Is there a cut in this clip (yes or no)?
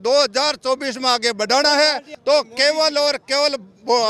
yes